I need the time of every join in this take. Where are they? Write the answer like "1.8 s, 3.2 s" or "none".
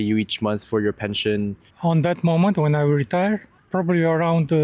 1.7 s, 3.6 s